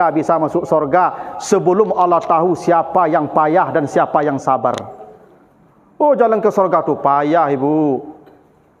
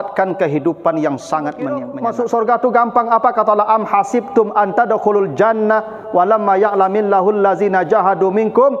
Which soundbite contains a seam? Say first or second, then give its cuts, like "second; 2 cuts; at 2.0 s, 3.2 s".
second; 1 cut; at 1.9 s